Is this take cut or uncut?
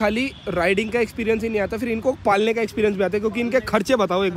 uncut